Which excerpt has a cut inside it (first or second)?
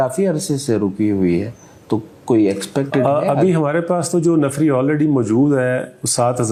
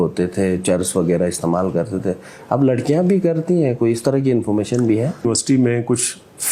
second